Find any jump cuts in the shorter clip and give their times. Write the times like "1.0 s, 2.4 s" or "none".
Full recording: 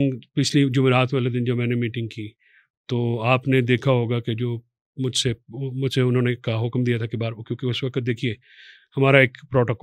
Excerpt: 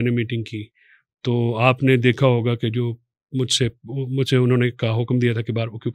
none